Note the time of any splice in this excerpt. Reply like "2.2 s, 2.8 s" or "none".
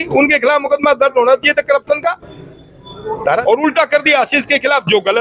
3.4 s

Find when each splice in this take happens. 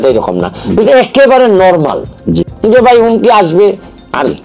2.5 s

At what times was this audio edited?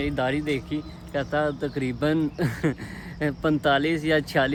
none

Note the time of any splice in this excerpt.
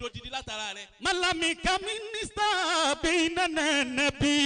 none

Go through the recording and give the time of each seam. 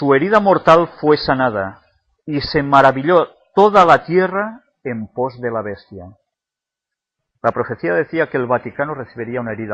none

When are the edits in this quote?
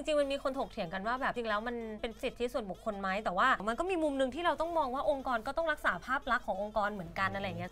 1.3 s

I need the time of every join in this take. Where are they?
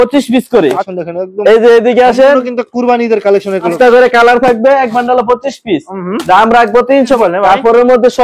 0.9 s, 3.7 s, 7.2 s

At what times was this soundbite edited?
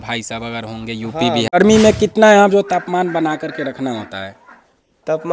1.4 s

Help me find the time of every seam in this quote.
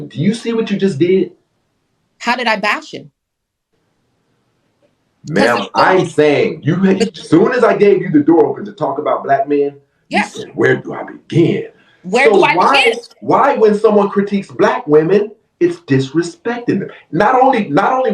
12.3 s

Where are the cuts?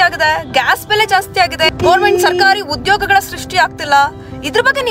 1.7 s

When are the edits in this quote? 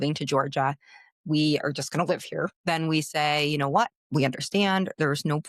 2.6 s, 4.0 s

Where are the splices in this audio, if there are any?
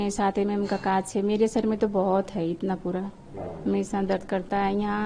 none

